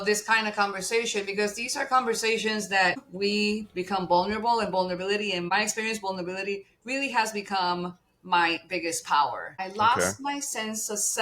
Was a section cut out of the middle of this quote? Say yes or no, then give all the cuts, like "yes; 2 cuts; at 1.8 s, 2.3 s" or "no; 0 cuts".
yes; 3 cuts; at 3.1 s, 5.5 s, 9.6 s